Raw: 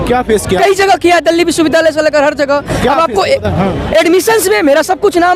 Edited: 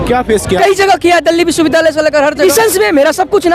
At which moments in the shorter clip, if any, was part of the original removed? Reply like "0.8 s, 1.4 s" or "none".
2.4 s